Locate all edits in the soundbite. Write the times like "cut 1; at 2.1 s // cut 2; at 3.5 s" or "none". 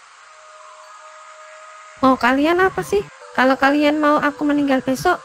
cut 1; at 3.2 s